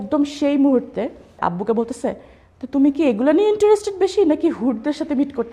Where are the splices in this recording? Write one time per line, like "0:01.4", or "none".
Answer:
0:01.4